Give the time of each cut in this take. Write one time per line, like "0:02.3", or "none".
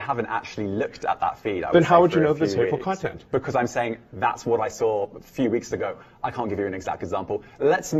none